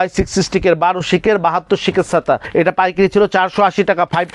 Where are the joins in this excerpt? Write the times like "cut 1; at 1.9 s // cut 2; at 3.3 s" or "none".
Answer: cut 1; at 2.5 s